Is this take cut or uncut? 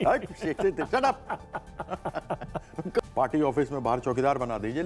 cut